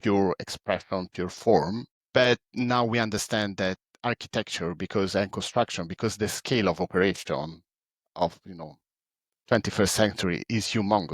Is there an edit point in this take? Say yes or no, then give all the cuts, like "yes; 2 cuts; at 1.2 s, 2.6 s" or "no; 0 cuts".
yes; 1 cut; at 1.9 s